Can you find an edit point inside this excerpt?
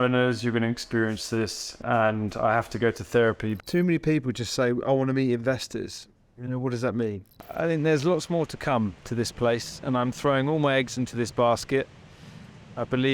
yes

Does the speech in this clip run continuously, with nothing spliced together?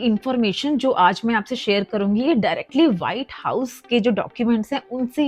yes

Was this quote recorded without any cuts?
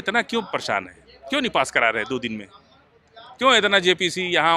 yes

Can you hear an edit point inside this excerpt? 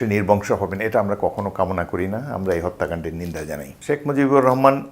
yes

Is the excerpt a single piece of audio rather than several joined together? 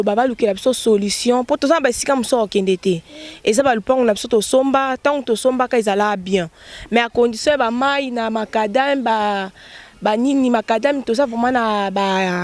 yes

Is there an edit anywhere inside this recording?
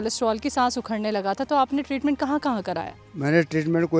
no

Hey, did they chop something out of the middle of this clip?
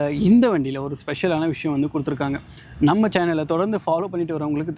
no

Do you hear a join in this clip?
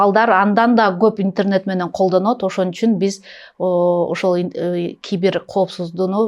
no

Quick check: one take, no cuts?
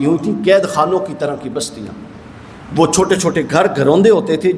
yes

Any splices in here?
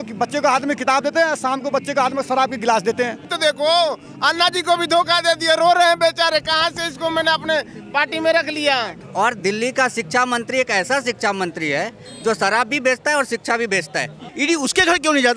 yes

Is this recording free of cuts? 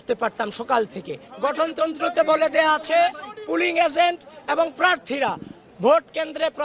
no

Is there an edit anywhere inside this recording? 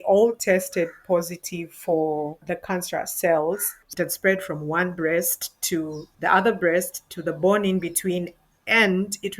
yes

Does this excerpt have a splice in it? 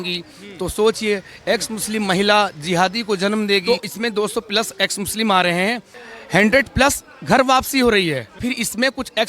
yes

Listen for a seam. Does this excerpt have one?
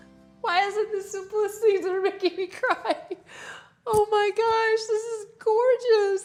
no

